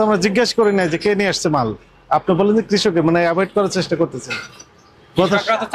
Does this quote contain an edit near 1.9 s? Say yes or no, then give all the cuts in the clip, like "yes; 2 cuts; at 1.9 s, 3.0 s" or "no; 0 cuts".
no; 0 cuts